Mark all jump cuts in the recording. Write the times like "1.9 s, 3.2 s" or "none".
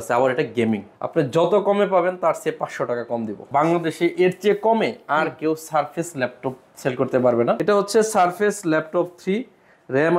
0.9 s, 3.4 s, 7.6 s